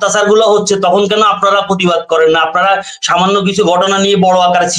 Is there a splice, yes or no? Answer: no